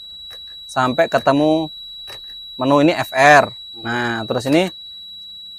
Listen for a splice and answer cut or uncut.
uncut